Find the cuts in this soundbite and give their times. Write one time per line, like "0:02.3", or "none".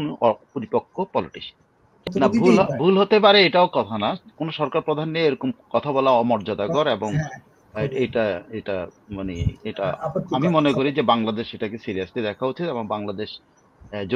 0:02.1